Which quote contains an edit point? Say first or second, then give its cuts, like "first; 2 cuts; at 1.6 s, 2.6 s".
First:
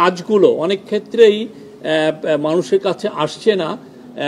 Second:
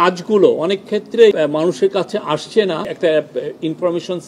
second; 2 cuts; at 1.4 s, 2.9 s